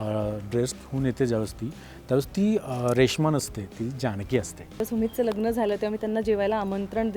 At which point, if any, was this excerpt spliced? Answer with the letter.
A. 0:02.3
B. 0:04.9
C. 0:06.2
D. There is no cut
B